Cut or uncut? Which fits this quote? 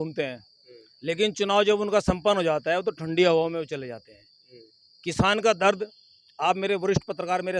uncut